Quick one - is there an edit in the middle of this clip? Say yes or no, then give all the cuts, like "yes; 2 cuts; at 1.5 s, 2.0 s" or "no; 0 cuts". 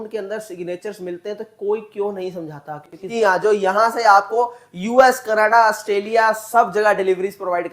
yes; 1 cut; at 3.0 s